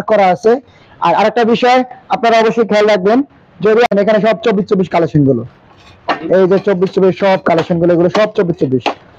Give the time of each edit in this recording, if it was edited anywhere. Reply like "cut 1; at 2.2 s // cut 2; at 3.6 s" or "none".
cut 1; at 3.9 s